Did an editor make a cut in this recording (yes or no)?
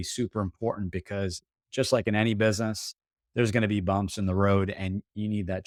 no